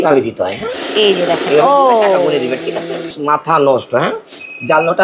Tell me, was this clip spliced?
yes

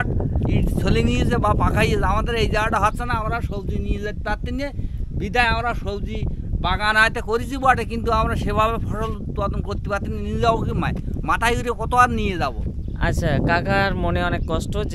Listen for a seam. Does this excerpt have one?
no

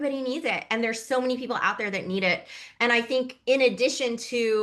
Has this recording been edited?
no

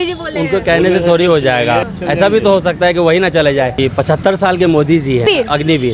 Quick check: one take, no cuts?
no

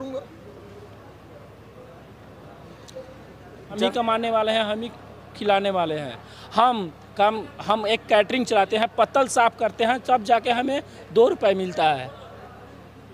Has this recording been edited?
yes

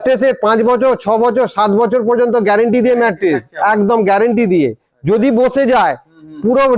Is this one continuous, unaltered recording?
yes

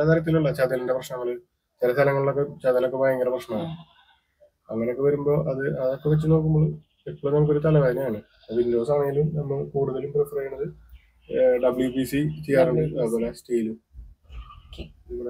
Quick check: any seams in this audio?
no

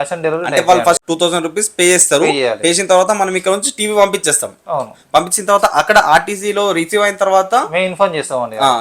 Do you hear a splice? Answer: yes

